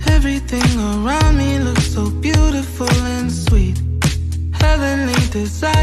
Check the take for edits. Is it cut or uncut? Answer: uncut